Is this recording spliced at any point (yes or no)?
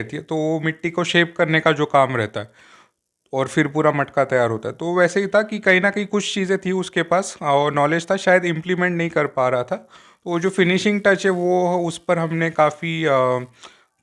no